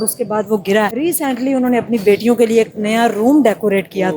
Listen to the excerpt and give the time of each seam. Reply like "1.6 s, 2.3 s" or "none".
0.9 s